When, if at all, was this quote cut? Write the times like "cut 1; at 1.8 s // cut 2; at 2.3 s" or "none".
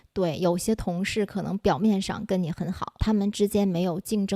cut 1; at 3.0 s